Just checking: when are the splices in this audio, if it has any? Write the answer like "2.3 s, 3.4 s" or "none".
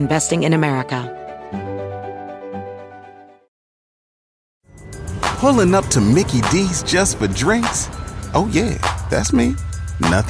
1.1 s

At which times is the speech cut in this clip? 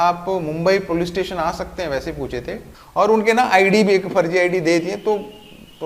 2.7 s

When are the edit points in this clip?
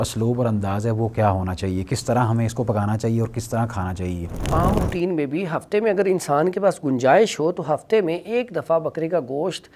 4.5 s

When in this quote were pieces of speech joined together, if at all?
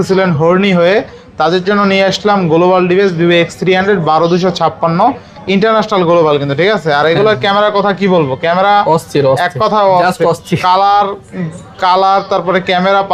none

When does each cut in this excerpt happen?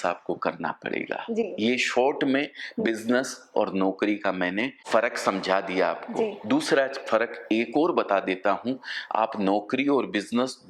none

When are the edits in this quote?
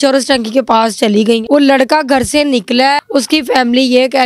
1.4 s, 3.0 s

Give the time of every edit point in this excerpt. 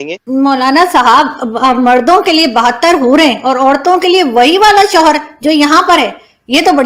none

